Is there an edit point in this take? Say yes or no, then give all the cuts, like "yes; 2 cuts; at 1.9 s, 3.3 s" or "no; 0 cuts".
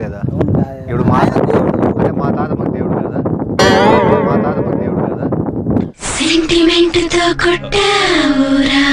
no; 0 cuts